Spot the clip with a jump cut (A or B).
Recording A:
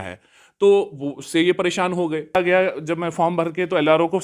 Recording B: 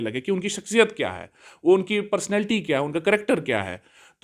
A